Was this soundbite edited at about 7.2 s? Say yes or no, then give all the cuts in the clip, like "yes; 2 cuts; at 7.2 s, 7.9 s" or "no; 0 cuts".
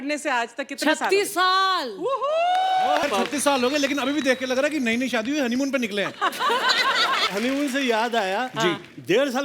yes; 2 cuts; at 3.0 s, 7.2 s